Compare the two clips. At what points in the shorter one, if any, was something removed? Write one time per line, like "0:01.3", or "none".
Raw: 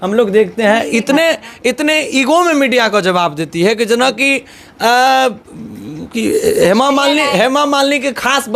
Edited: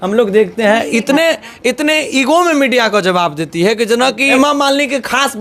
0:04.3